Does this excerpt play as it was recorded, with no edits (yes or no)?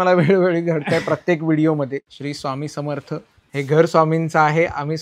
no